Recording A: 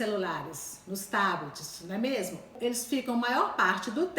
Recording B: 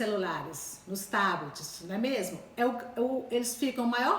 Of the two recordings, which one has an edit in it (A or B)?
A